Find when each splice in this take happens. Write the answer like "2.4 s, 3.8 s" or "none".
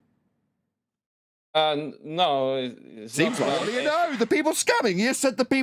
3.7 s